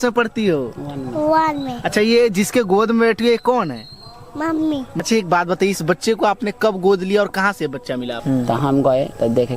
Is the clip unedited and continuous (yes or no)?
no